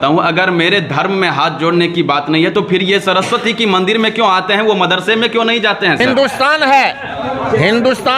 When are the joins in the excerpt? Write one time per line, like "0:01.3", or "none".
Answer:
0:06.0